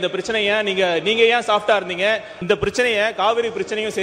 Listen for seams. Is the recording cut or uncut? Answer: cut